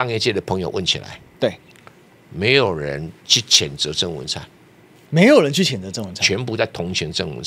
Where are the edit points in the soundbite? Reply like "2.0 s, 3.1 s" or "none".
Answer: none